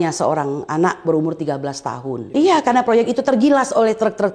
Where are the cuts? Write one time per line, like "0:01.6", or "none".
0:02.3